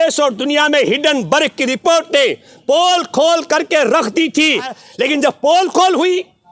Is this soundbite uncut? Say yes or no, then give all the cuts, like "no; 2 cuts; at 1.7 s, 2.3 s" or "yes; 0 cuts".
no; 1 cut; at 4.8 s